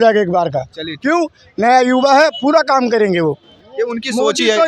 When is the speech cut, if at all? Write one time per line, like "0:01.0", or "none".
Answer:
none